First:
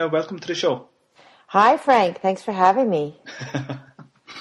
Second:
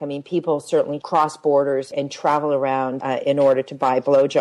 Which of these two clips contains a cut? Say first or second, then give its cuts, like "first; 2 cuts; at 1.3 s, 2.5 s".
second; 3 cuts; at 1.0 s, 1.9 s, 3.0 s